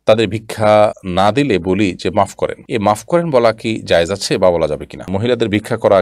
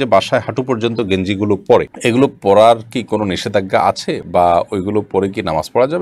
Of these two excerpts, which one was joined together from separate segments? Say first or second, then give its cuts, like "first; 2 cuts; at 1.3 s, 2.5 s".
first; 2 cuts; at 1.0 s, 5.1 s